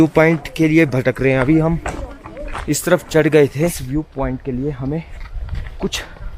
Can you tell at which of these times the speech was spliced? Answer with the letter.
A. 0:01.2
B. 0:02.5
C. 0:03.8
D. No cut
C